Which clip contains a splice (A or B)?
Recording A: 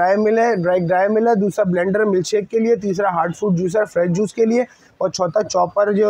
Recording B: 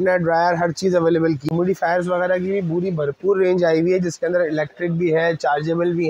B